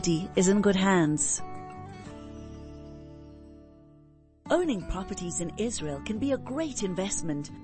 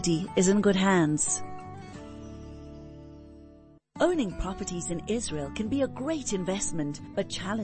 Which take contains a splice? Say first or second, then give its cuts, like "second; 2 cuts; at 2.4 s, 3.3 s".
second; 2 cuts; at 1.2 s, 3.7 s